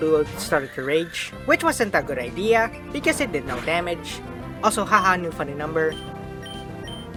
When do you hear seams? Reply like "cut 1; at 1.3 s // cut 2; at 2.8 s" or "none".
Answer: none